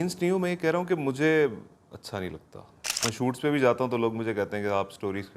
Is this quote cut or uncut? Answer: cut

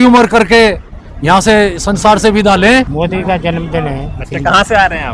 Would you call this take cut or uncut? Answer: cut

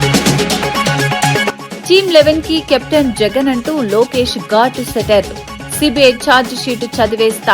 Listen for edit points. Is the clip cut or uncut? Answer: cut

